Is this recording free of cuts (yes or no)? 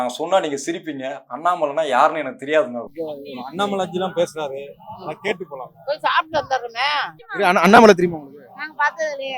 no